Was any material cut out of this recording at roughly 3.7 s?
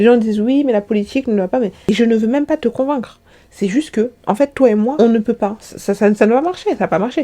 no; 1 cut; at 1.9 s

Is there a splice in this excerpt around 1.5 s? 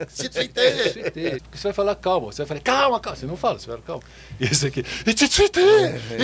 yes; 1 cut; at 1.5 s

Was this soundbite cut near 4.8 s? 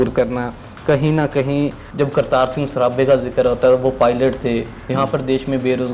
no; 1 cut; at 1.8 s

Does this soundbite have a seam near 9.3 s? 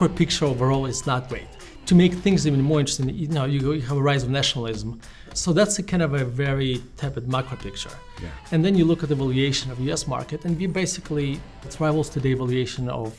no; 3 cuts; at 1.3 s, 5.3 s, 11.7 s

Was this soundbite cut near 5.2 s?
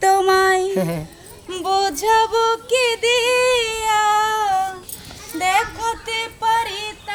no; 0 cuts

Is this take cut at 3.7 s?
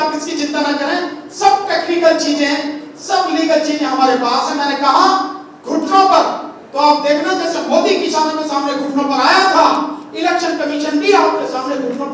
no; 0 cuts

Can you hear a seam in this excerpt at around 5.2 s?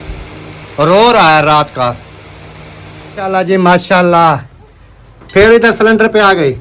no; 1 cut; at 3.3 s

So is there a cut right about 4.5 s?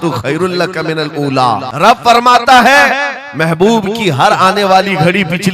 no; 1 cut; at 1.7 s

